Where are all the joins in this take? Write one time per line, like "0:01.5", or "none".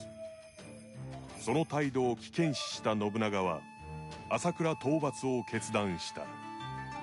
0:06.1

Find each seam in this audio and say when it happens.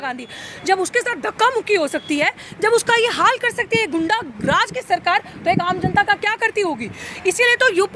none

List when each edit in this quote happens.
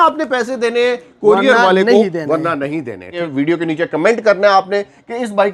0:03.2

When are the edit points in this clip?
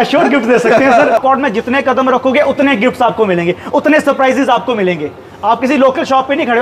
0:01.2

